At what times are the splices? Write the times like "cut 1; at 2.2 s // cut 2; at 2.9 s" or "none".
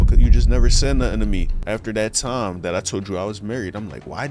cut 1; at 1.5 s